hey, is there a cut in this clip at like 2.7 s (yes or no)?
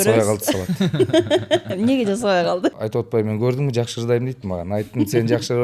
yes